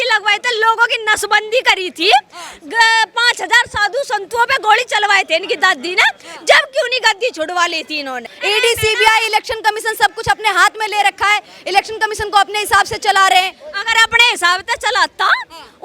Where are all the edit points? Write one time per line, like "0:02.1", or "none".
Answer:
0:08.3